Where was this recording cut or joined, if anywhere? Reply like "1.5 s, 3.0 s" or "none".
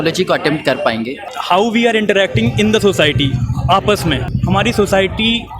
1.3 s, 4.3 s